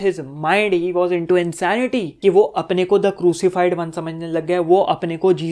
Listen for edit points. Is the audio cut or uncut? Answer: cut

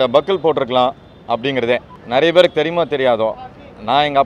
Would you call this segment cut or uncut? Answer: cut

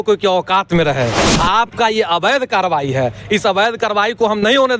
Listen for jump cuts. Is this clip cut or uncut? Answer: cut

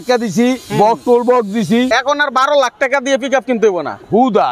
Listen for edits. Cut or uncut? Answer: cut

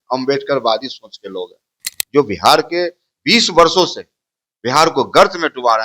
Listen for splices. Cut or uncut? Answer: cut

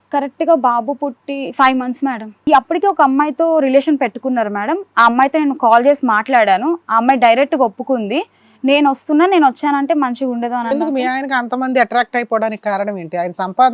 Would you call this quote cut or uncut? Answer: cut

